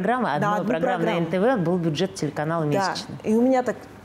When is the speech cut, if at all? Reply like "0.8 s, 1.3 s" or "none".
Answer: none